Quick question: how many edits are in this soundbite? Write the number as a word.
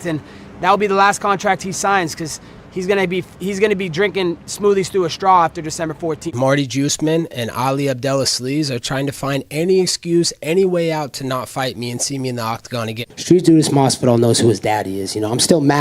two